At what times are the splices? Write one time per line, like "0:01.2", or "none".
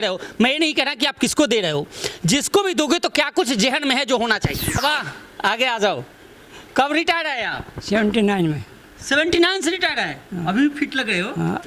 0:04.8